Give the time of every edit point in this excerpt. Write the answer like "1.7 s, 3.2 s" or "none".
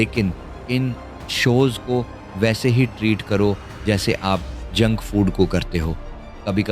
none